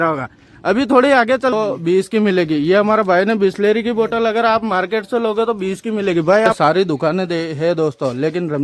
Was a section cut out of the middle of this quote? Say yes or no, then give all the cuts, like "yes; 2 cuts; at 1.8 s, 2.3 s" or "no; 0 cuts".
yes; 2 cuts; at 1.5 s, 6.5 s